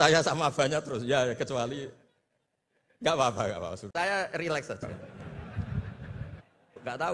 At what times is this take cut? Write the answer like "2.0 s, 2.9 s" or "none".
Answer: 3.8 s, 4.8 s